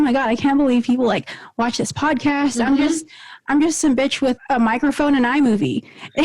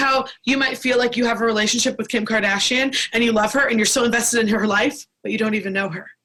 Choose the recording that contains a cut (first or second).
first